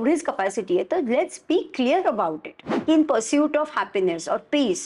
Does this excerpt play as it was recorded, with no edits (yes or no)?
no